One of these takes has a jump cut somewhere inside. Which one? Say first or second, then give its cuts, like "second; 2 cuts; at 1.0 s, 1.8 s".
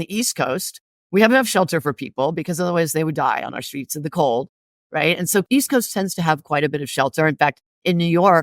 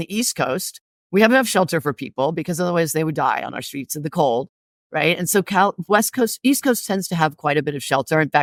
first; 1 cut; at 5.5 s